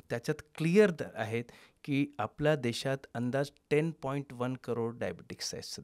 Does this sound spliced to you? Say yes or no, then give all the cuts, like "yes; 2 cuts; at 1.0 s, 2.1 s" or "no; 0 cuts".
no; 0 cuts